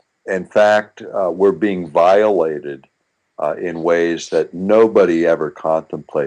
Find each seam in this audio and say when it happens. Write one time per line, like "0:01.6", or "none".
0:01.0